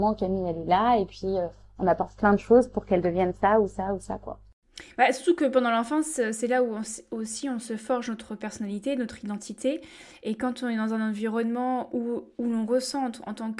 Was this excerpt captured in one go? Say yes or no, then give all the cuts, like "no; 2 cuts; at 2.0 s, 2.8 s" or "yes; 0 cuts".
yes; 0 cuts